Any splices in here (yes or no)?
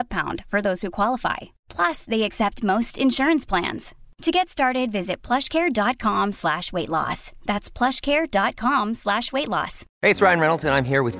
no